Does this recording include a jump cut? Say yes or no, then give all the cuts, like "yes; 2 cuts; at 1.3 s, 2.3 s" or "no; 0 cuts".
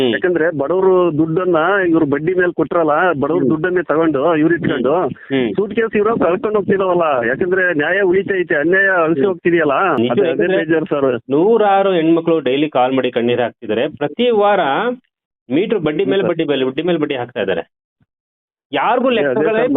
yes; 1 cut; at 10.0 s